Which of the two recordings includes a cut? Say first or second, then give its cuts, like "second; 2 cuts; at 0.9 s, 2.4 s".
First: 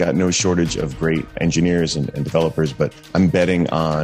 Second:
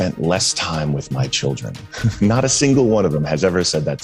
first; 2 cuts; at 1.3 s, 3.0 s